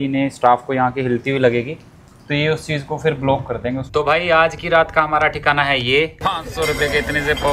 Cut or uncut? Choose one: cut